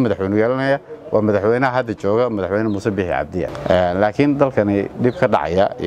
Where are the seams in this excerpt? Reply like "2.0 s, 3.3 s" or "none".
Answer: 3.6 s